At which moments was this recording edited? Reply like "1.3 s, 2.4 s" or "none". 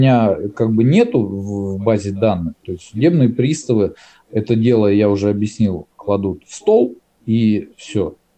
none